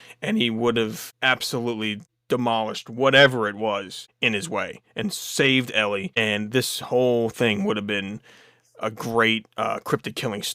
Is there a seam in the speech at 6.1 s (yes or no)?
yes